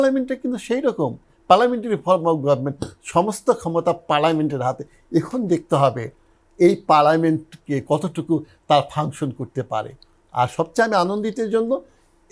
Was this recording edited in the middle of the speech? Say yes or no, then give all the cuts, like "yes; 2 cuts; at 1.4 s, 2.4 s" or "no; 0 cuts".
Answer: no; 0 cuts